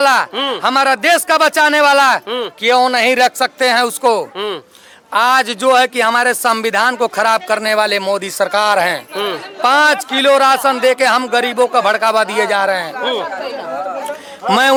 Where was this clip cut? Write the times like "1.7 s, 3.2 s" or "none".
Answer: none